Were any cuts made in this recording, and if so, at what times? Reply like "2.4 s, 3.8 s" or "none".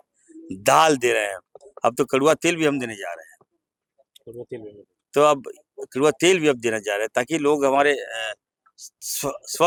none